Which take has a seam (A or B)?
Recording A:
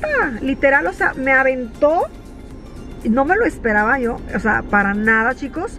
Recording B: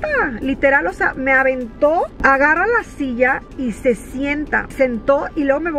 B